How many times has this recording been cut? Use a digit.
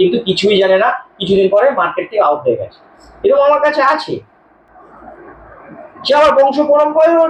0